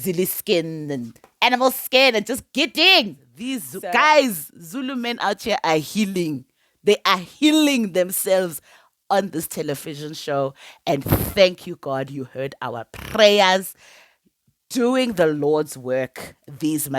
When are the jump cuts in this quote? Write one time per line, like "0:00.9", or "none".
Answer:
0:03.8